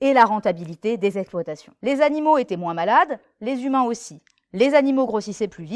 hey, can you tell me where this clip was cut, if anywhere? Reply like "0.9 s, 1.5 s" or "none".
1.7 s